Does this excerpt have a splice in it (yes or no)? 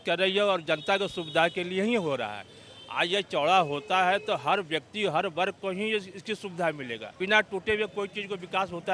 yes